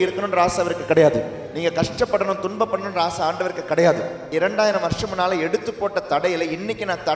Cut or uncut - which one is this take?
cut